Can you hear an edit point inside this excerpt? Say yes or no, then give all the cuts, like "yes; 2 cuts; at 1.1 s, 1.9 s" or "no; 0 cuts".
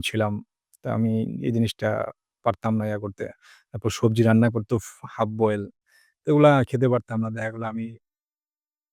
no; 0 cuts